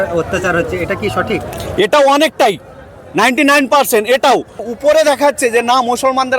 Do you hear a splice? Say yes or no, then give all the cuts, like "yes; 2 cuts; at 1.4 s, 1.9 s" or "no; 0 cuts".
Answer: yes; 1 cut; at 4.6 s